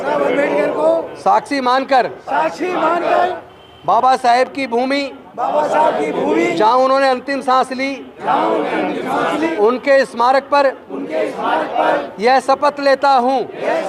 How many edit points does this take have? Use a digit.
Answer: 1